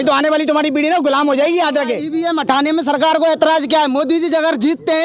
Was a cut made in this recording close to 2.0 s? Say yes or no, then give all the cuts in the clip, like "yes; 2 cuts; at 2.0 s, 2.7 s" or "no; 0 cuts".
yes; 1 cut; at 2.0 s